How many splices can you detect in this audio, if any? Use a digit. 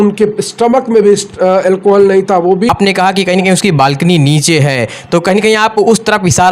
1